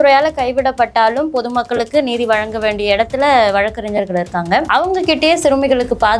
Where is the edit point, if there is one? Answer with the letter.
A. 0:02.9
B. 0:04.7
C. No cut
B